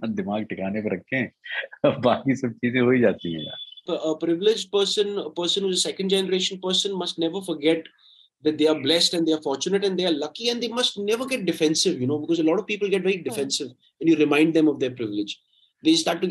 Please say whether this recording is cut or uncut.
cut